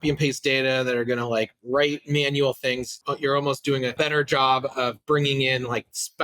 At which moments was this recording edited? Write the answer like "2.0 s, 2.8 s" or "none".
3.0 s, 4.0 s